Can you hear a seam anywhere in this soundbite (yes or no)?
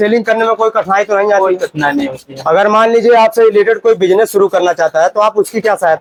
no